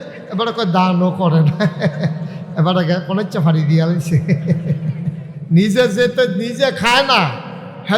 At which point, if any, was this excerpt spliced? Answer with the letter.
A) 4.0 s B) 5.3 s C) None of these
B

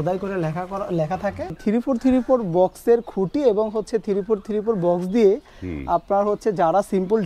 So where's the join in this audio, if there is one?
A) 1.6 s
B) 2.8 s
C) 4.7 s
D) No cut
A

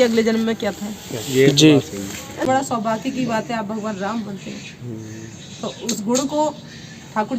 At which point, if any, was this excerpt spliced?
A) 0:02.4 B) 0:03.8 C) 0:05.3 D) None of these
A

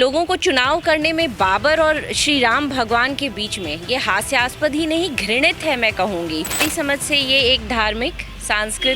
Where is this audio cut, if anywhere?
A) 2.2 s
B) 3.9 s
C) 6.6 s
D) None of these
C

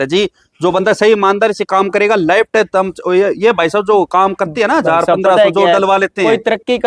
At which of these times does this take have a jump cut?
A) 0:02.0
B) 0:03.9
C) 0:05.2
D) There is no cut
D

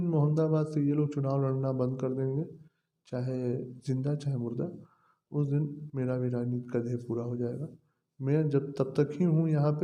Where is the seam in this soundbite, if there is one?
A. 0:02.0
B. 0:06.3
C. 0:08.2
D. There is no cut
D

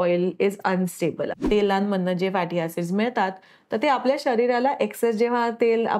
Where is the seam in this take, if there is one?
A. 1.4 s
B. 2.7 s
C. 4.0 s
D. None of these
A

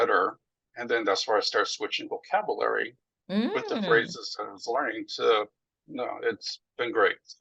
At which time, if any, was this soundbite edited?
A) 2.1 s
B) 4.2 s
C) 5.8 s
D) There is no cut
C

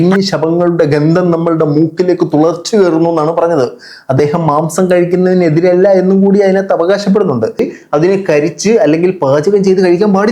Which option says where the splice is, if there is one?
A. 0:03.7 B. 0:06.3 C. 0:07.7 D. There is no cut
C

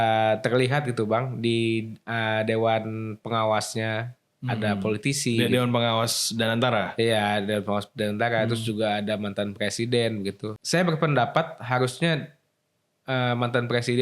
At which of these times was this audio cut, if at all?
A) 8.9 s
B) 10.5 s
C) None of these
B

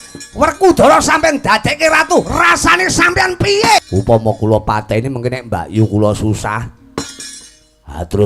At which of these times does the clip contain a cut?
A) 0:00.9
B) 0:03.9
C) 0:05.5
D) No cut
B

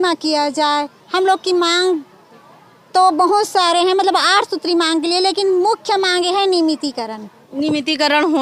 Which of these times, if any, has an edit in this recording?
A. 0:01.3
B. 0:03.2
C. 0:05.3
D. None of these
D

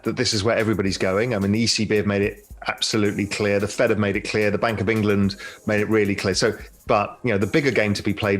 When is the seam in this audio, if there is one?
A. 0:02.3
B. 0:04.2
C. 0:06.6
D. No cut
C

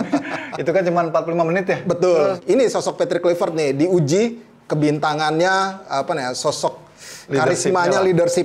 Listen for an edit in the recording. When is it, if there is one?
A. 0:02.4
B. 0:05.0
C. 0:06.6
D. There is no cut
A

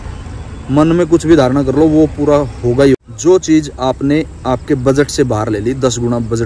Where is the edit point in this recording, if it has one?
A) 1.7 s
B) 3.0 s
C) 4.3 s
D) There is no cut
B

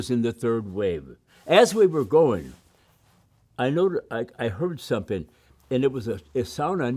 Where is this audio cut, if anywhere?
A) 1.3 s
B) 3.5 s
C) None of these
A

